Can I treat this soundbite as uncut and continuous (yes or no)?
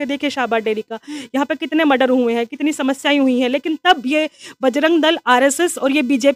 yes